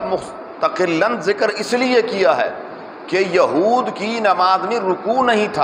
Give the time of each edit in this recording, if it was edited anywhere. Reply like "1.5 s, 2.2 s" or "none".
none

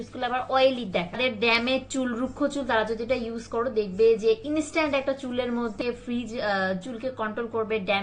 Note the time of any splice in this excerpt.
1.2 s, 5.8 s

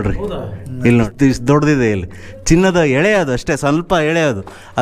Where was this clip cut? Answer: 1.1 s

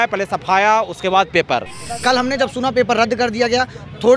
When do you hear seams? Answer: 1.8 s

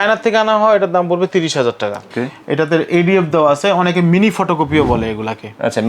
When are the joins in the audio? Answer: 2.0 s

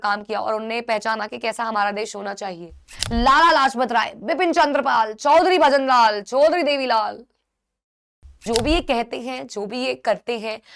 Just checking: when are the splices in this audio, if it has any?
2.9 s, 8.5 s

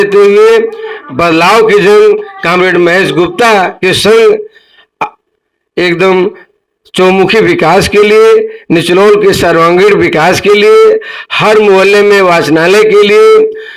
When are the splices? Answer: none

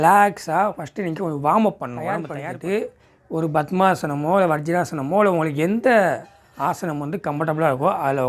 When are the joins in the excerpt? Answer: 2.3 s

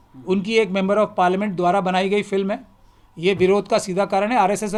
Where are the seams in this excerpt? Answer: none

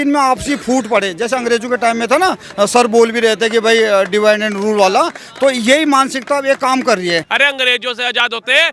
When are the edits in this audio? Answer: 7.3 s

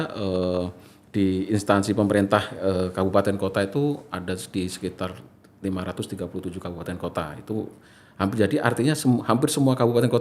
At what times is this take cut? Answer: none

